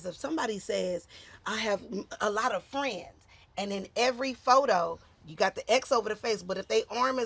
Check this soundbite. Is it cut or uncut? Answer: uncut